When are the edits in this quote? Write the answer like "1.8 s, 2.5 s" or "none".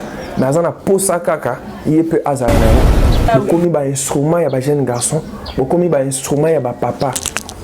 3.0 s

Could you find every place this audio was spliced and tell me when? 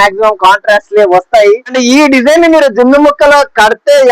1.7 s

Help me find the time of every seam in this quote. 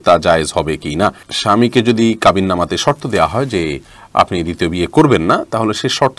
none

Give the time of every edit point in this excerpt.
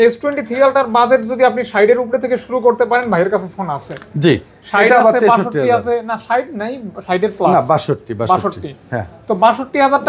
none

